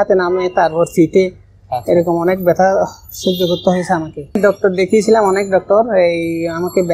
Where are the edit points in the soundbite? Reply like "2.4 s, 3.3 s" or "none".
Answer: 4.4 s